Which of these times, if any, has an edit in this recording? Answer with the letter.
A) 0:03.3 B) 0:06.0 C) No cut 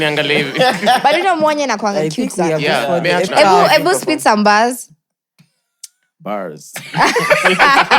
A